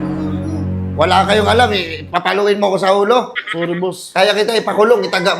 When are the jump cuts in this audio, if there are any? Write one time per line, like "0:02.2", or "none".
0:03.4